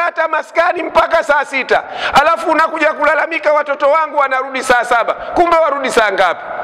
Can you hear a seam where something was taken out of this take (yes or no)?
no